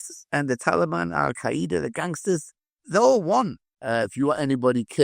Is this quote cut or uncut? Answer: cut